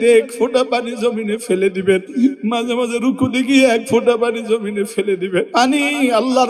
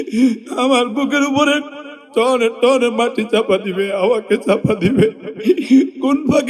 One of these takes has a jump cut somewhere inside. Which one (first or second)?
first